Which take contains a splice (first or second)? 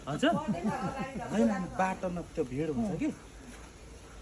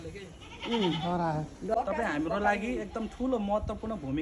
second